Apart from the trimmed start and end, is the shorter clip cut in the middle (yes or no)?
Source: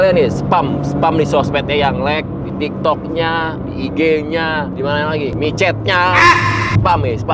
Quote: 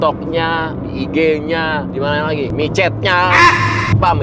no